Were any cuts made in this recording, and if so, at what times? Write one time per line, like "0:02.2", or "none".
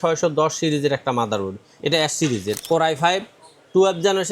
0:02.6